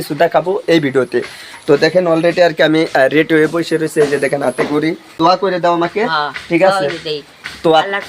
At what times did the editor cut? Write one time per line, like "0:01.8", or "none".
0:05.2